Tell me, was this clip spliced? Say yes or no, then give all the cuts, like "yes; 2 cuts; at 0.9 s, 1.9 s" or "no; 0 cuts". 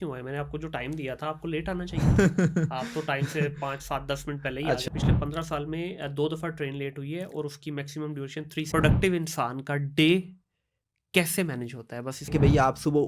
yes; 3 cuts; at 4.9 s, 8.7 s, 12.3 s